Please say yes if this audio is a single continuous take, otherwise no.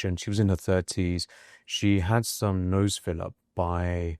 yes